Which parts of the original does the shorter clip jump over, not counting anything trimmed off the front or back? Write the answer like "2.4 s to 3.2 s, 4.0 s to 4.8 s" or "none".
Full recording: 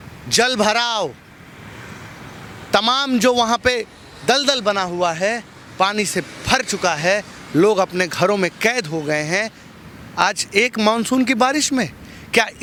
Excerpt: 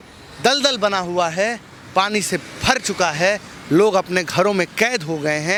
none